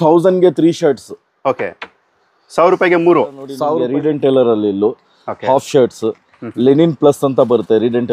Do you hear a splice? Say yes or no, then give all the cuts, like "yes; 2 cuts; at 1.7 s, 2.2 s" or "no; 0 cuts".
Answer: yes; 1 cut; at 3.6 s